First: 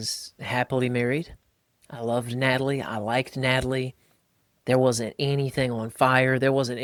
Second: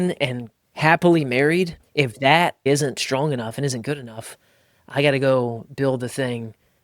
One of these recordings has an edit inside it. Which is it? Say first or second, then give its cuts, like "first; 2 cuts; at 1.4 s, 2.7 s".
second; 2 cuts; at 1.8 s, 2.6 s